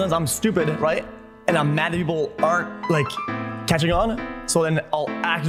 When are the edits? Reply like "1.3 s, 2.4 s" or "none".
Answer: none